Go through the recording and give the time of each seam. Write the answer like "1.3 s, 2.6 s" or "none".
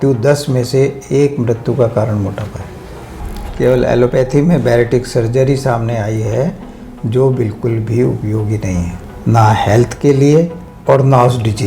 3.4 s, 9.0 s, 10.7 s